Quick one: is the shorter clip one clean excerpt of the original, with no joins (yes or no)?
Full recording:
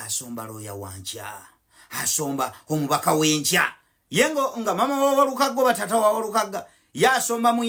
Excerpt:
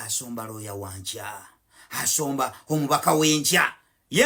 yes